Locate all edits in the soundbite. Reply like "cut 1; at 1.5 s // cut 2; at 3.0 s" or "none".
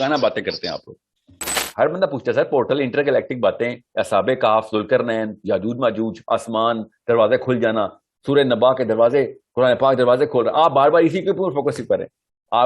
cut 1; at 1.6 s